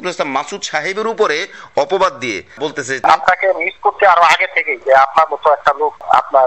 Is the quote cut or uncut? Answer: cut